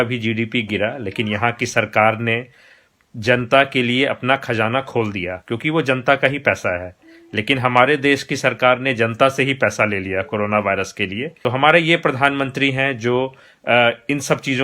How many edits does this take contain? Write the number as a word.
one